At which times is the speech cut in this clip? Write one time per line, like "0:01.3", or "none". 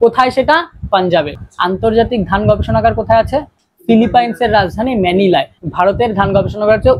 0:01.4